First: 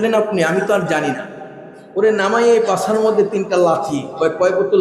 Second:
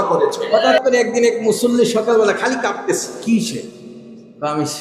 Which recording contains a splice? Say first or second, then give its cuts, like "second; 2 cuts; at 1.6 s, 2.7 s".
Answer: second; 2 cuts; at 0.8 s, 3.1 s